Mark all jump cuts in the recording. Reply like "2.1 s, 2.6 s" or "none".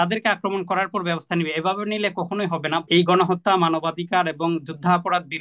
2.8 s